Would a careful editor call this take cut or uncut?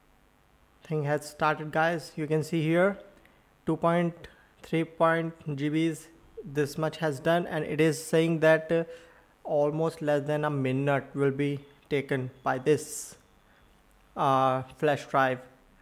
uncut